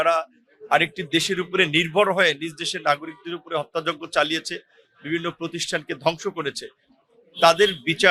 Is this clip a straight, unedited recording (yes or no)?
yes